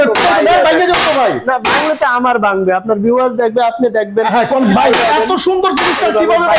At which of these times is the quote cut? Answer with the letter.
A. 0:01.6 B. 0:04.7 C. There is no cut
B